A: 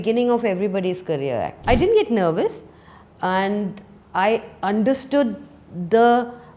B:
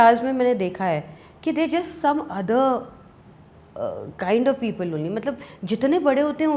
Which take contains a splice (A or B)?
A